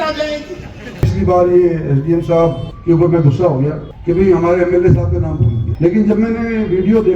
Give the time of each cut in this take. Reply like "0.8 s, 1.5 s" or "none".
1.1 s, 2.7 s, 3.9 s, 5.6 s

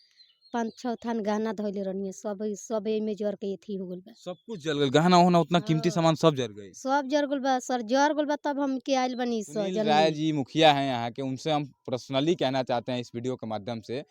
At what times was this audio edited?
9.9 s

